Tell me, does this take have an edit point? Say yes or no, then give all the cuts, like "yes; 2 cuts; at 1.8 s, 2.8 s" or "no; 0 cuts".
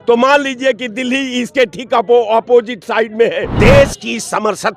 yes; 1 cut; at 3.5 s